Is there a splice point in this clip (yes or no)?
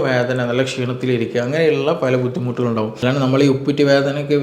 yes